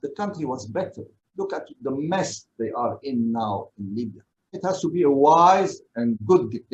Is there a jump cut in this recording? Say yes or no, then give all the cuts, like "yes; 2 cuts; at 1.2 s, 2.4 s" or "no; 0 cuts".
no; 0 cuts